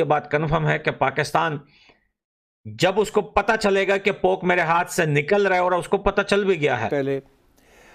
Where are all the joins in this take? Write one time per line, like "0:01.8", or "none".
0:06.9